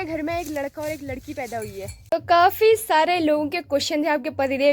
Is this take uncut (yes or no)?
no